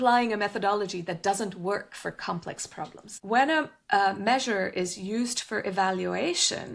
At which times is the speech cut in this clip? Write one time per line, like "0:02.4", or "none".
0:03.1